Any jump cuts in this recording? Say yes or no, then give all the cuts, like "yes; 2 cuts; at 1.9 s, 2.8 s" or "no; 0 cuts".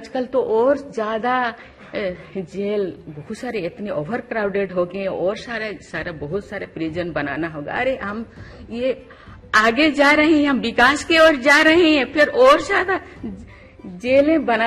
no; 0 cuts